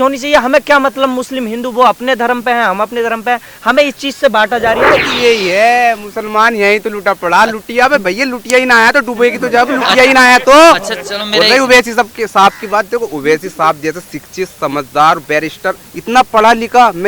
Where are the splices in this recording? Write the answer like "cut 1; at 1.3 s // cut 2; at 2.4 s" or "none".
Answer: cut 1; at 5.1 s